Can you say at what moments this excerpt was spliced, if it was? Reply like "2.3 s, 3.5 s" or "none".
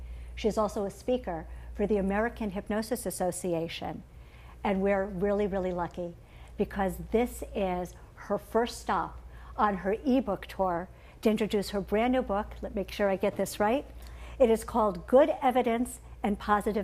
14.2 s